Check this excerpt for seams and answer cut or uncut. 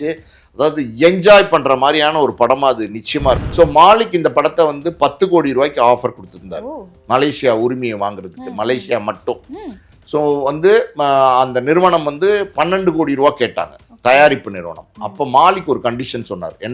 cut